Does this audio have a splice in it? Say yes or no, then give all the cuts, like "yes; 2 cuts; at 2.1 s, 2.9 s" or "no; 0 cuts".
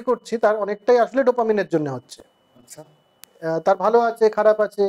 no; 0 cuts